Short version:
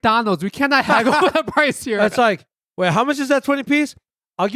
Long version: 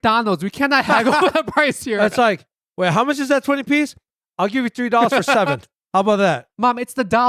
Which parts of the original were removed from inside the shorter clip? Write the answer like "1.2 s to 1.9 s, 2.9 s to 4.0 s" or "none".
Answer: none